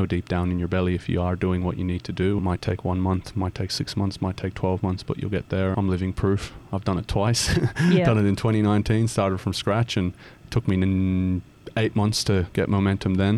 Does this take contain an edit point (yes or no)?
yes